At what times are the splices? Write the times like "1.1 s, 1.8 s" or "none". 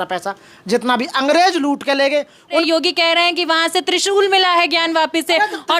2.6 s